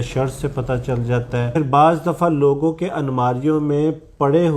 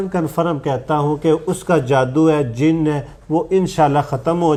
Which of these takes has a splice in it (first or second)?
first